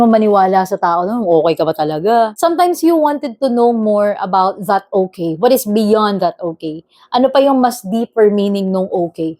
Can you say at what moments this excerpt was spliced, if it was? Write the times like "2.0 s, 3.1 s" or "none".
2.3 s